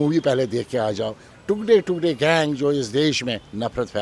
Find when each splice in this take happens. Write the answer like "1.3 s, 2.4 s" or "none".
1.3 s

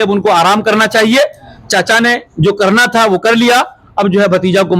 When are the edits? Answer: none

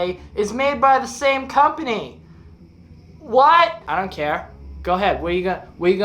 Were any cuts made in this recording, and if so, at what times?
3.8 s

